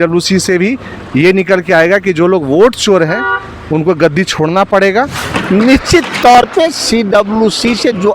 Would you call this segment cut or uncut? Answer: cut